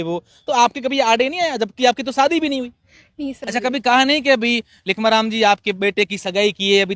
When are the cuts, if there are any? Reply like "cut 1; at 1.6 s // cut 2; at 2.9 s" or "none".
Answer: cut 1; at 3.5 s